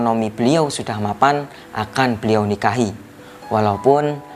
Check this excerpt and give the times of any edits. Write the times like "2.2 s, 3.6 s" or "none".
none